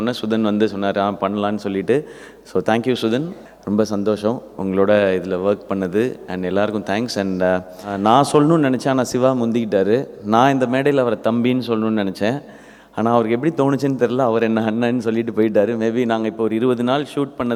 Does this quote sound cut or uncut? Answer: uncut